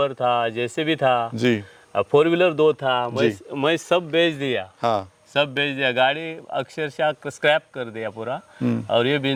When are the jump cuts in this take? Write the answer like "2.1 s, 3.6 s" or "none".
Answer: none